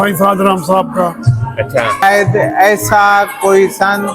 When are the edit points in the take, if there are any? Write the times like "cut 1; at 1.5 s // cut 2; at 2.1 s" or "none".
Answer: cut 1; at 2.0 s